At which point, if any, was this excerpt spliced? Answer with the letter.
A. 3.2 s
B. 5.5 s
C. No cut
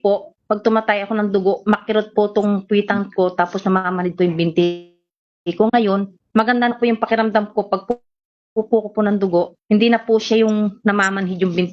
C